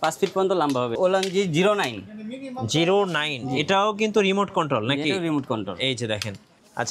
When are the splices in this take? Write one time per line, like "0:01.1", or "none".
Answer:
0:01.0

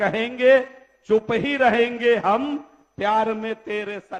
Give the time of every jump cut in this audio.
none

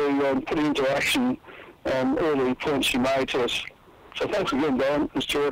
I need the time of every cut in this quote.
none

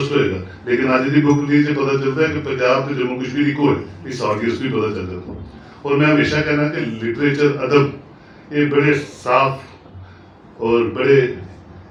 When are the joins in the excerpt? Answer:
none

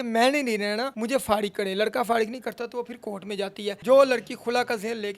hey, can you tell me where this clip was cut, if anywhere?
0:00.9
0:03.8

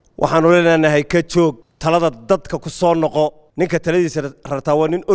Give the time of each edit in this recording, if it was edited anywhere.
0:01.7
0:03.4

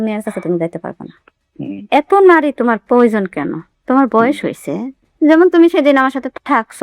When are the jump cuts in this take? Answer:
0:01.4

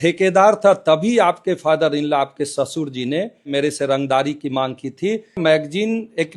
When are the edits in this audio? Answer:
0:03.5
0:05.4

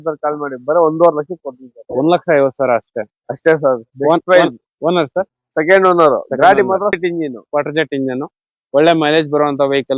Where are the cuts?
0:07.0

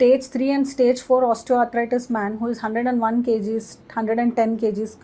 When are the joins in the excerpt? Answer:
none

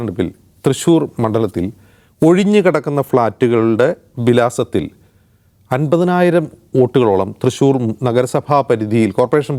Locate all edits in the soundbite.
none

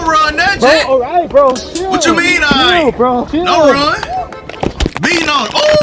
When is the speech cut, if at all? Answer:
none

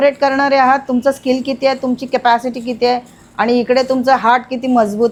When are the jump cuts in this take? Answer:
none

